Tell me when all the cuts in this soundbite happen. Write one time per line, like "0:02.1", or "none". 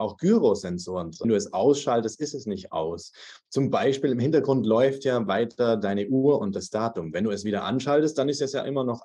0:01.2